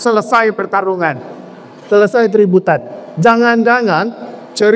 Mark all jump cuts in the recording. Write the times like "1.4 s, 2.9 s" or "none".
none